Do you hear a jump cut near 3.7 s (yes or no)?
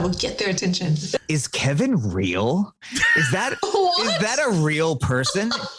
no